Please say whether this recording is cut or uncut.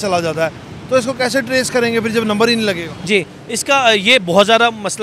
uncut